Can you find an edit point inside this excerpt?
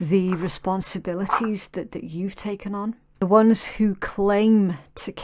yes; 1 cut; at 3.2 s

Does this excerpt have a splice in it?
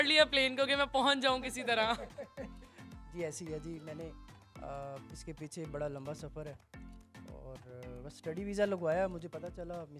no; 0 cuts

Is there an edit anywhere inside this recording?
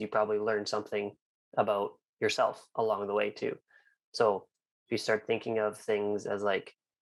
no; 0 cuts

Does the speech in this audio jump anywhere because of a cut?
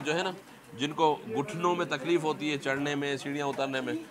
no; 0 cuts

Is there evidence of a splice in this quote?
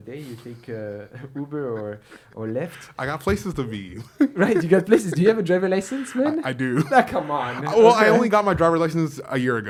no; 0 cuts

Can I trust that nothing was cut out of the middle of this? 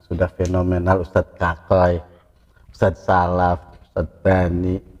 yes; 0 cuts

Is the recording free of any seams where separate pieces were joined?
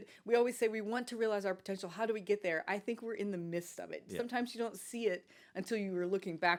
yes; 0 cuts

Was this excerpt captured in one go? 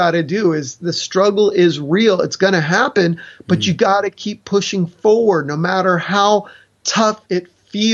yes; 0 cuts

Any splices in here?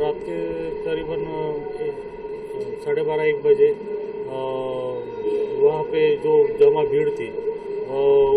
no; 0 cuts

